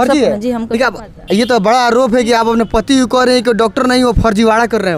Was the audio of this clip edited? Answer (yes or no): no